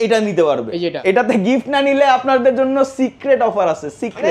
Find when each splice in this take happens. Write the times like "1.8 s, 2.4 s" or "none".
0.9 s